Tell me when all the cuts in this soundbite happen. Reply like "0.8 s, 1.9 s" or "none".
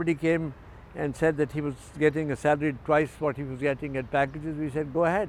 none